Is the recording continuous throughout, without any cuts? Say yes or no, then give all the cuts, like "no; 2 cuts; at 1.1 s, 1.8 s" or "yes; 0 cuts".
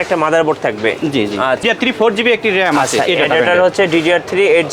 no; 1 cut; at 1.6 s